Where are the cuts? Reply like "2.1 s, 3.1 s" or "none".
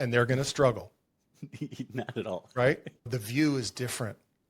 2.9 s